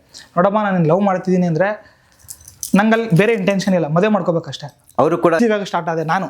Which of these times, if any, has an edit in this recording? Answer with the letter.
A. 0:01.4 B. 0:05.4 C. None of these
B